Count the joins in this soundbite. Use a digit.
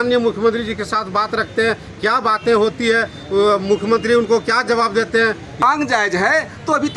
1